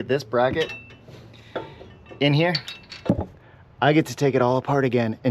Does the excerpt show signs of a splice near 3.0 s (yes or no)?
yes